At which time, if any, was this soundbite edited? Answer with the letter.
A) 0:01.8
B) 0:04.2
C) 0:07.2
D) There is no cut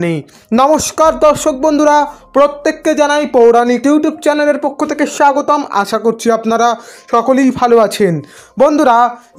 D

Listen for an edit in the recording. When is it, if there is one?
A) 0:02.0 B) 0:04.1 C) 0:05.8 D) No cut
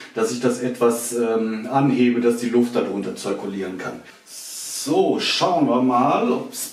D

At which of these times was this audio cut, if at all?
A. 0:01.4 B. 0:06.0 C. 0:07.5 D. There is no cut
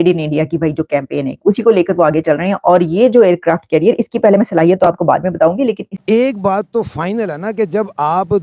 B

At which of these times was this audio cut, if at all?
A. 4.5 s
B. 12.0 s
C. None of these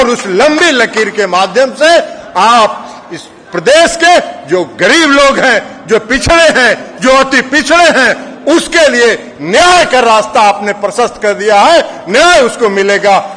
C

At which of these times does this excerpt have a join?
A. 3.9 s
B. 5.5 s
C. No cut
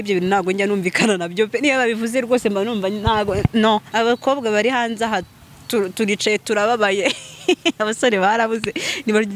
A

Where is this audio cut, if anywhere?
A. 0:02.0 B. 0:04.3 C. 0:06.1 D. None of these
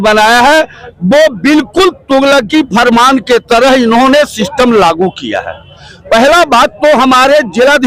D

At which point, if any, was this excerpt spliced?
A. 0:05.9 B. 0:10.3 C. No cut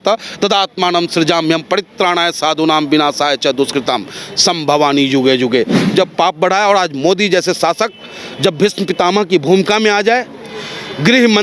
A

